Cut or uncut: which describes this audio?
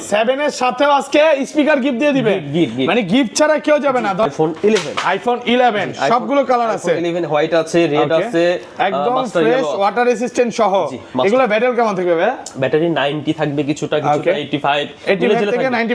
cut